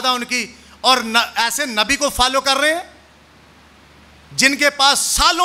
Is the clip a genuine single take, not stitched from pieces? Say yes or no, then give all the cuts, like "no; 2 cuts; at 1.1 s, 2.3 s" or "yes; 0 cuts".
yes; 0 cuts